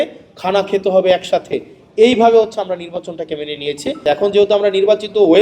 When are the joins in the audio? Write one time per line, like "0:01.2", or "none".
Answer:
0:04.0